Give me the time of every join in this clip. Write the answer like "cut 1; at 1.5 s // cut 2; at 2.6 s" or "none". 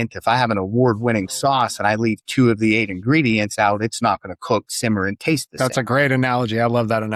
none